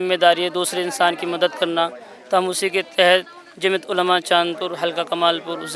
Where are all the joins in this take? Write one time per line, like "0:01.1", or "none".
none